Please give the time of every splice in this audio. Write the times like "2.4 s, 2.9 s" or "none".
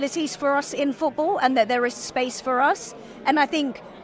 none